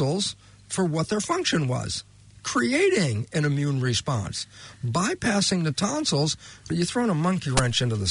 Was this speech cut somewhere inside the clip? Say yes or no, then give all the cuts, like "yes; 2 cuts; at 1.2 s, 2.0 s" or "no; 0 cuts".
yes; 1 cut; at 6.7 s